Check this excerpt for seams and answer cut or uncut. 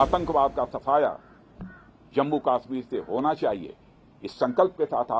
uncut